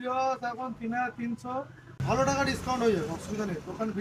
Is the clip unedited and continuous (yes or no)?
no